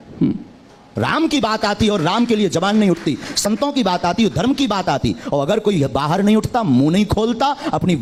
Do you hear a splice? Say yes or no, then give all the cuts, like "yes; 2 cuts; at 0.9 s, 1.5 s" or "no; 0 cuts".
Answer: no; 0 cuts